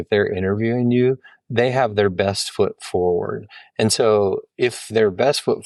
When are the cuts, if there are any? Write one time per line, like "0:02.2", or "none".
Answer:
none